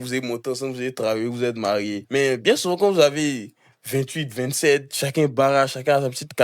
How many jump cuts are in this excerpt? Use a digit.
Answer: 1